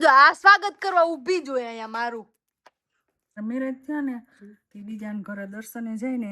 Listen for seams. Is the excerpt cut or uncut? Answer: cut